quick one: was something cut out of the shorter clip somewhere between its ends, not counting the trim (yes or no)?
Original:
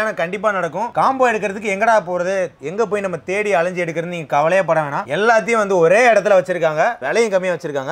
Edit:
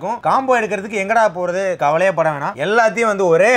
yes